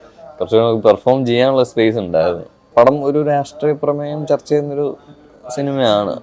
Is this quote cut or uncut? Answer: cut